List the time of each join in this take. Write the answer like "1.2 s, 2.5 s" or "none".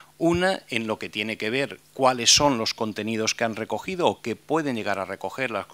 4.5 s